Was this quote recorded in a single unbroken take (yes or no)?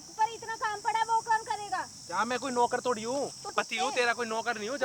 no